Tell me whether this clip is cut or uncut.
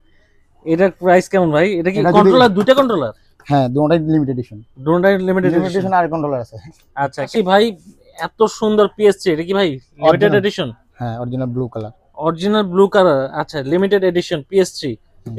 cut